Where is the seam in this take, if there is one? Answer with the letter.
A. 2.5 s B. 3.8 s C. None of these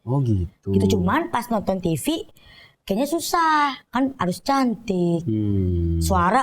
B